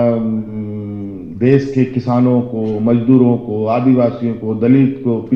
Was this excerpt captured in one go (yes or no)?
yes